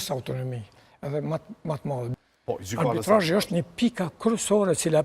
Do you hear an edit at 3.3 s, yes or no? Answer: no